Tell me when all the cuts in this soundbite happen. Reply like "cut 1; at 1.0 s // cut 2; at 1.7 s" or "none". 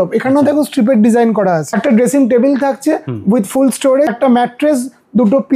cut 1; at 1.7 s // cut 2; at 4.1 s